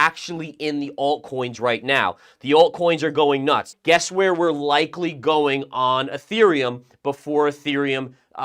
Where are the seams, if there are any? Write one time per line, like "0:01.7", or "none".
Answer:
0:03.7